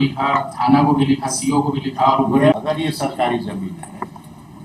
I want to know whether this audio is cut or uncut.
cut